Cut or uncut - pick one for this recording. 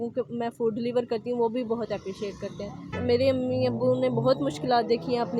cut